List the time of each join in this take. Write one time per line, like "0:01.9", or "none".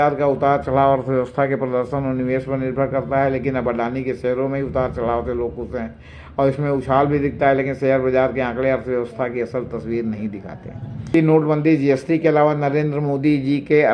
0:11.1